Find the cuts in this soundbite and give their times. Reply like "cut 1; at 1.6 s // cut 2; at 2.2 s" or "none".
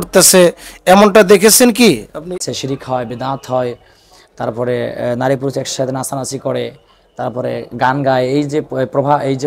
cut 1; at 2.4 s